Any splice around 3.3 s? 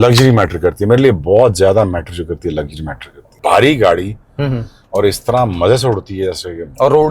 yes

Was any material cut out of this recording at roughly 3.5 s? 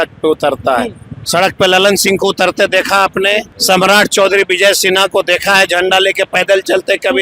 yes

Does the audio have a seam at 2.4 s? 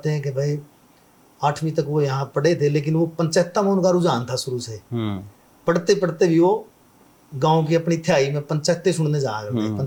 no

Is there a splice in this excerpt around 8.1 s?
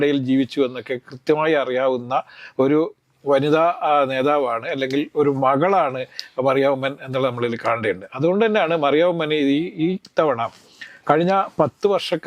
no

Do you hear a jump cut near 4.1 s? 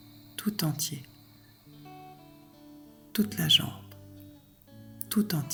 no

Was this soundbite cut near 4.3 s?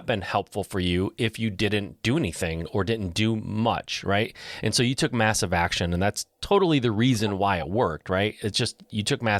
no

